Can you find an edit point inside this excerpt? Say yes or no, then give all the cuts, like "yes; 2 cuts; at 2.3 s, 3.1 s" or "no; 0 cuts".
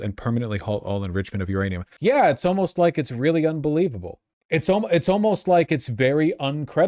yes; 1 cut; at 1.9 s